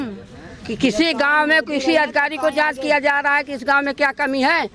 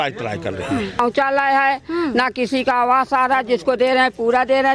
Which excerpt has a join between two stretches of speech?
second; 1 cut; at 1.0 s

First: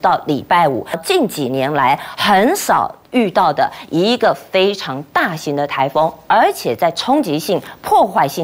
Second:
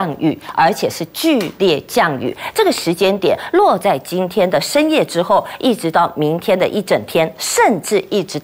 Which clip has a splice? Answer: first; 1 cut; at 1.0 s

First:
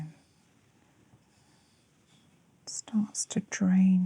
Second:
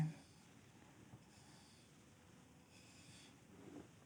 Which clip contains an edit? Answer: first; 1 cut; at 2.1 s

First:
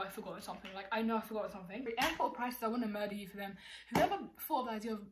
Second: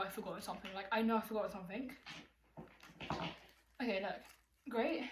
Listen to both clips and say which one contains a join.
first; 1 cut; at 1.9 s

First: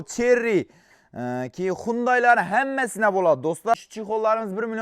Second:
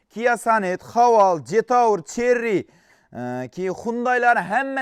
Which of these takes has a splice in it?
first; 1 cut; at 3.7 s

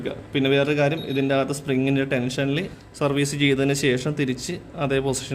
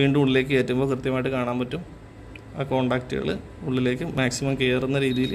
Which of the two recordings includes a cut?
first; 1 cut; at 2.7 s

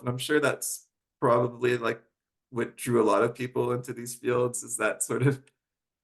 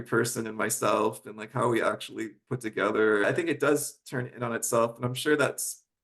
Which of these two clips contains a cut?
second; 1 cut; at 3.2 s

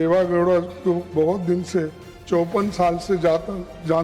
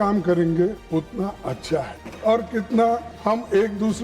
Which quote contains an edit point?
second; 3 cuts; at 0.8 s, 2.0 s, 3.1 s

